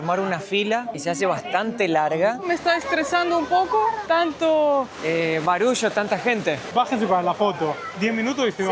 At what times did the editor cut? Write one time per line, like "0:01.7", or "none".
0:00.9
0:02.5
0:04.0
0:05.0
0:06.7

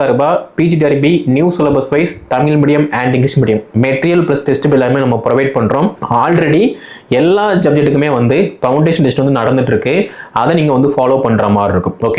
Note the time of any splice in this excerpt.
none

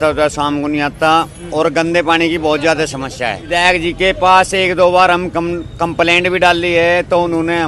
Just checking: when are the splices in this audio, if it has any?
0:03.4

